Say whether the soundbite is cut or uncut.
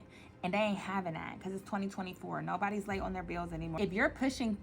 cut